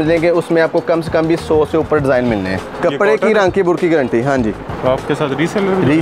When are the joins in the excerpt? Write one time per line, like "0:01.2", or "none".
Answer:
0:02.7
0:04.7